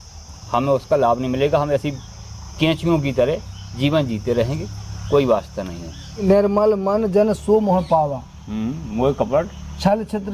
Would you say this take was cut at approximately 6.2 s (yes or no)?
yes